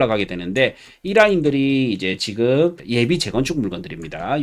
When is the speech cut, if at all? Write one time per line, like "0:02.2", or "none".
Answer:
0:02.8